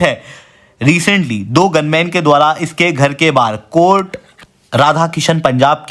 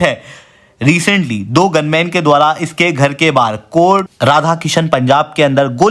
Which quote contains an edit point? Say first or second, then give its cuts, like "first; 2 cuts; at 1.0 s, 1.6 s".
second; 1 cut; at 4.1 s